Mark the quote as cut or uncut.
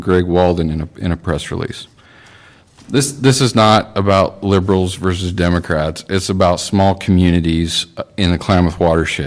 uncut